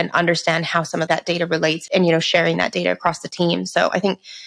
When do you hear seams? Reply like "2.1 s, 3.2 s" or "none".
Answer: 1.4 s